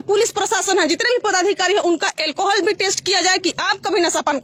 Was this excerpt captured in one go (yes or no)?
yes